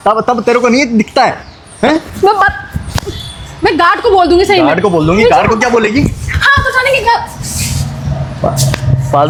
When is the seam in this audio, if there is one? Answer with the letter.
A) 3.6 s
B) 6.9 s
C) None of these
C